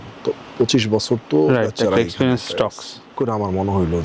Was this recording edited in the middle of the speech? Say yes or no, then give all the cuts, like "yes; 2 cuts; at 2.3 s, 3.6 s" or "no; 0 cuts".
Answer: yes; 1 cut; at 3.0 s